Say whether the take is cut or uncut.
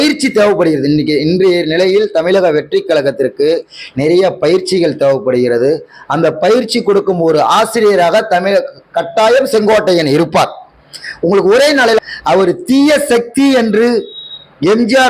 cut